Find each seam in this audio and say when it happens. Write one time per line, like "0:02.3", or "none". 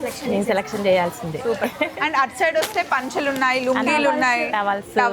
none